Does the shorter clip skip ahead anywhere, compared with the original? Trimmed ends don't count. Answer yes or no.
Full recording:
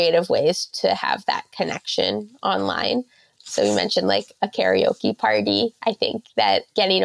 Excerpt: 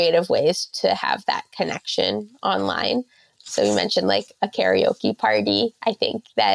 no